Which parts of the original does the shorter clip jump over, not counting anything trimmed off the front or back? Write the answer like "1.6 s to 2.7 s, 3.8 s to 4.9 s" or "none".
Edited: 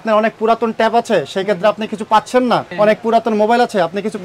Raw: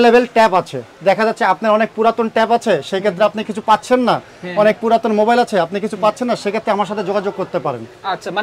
4.3 s to 4.5 s

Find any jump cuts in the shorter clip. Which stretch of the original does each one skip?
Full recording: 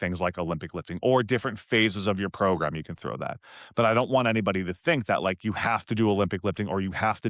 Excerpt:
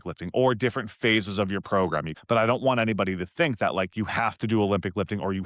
2.8 s to 3.6 s

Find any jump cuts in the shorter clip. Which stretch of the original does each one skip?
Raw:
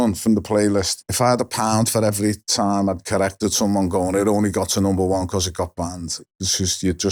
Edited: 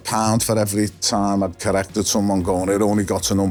none

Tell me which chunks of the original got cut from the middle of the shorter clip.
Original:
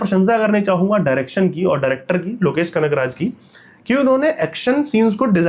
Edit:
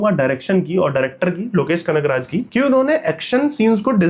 3.3 s to 3.8 s

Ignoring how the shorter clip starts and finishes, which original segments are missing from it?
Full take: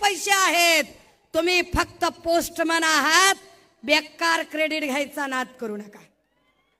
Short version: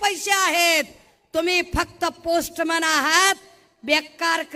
none

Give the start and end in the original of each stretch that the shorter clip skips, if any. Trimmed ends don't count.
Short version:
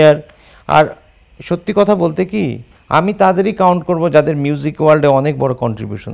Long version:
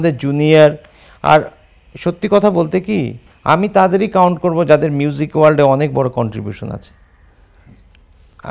none

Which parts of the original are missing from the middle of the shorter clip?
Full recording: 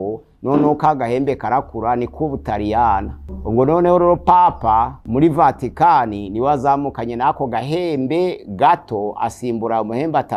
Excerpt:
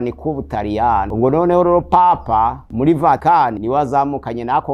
3.0 s to 3.4 s, 5.7 s to 6.1 s

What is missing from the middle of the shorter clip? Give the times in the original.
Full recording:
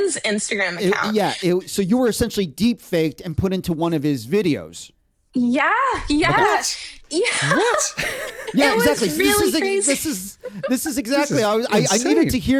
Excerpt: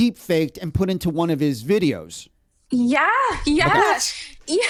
none

